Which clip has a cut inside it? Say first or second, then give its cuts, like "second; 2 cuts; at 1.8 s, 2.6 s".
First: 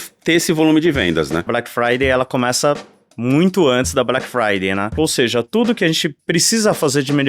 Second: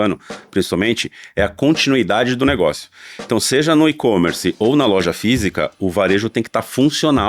first; 2 cuts; at 1.5 s, 4.9 s